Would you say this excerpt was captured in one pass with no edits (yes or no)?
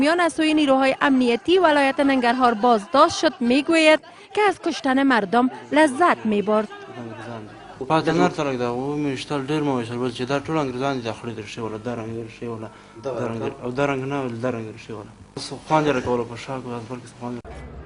no